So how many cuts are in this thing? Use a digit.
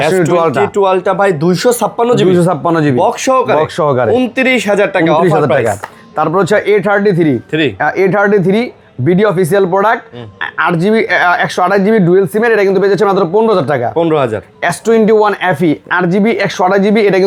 0